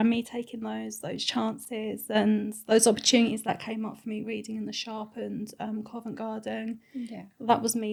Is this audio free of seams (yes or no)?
yes